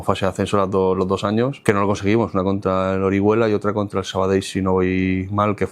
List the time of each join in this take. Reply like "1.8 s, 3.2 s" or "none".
1.6 s